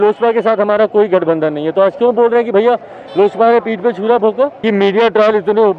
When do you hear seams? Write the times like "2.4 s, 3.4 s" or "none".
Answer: 4.6 s